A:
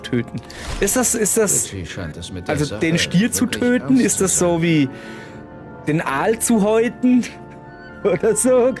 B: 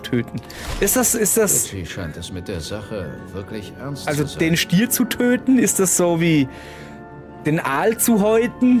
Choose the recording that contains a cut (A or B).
A